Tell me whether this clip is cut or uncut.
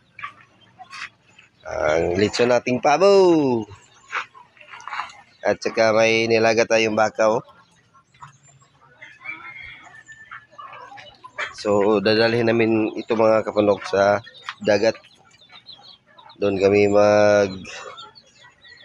uncut